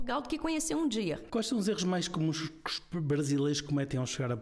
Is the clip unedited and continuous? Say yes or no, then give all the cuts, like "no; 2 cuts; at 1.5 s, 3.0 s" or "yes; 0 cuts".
no; 1 cut; at 1.2 s